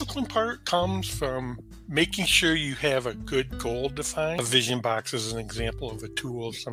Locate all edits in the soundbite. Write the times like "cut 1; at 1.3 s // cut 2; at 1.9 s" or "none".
cut 1; at 4.4 s